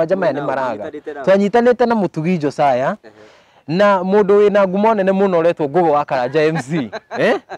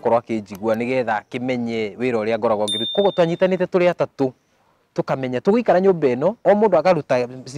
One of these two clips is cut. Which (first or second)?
second